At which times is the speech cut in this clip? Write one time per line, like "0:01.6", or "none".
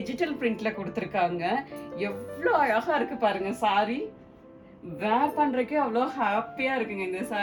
none